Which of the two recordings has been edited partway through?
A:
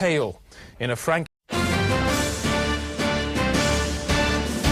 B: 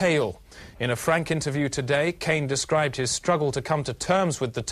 B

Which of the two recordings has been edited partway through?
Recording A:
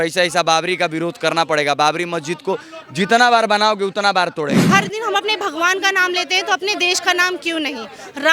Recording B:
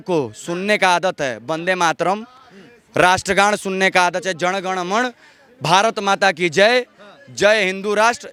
A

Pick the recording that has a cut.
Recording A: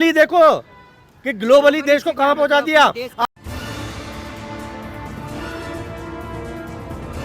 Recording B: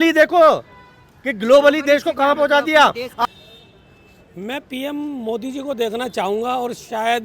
B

